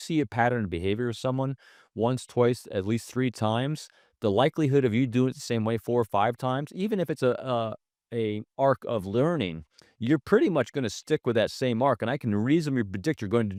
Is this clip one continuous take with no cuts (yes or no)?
yes